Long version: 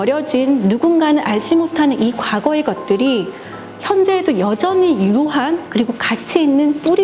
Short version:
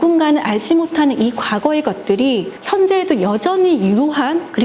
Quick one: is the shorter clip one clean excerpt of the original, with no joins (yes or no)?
no